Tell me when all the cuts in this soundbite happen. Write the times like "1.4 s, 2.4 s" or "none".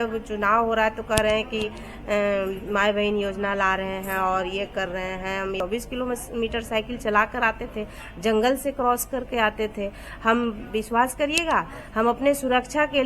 5.6 s